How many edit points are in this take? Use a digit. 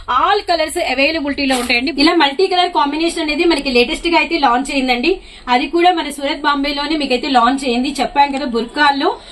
1